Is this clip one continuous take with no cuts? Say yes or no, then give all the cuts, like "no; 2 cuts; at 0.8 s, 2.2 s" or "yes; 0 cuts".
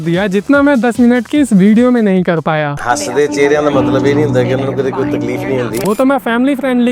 no; 1 cut; at 5.8 s